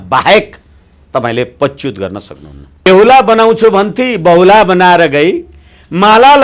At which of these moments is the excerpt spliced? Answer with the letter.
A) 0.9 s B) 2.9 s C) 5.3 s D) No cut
B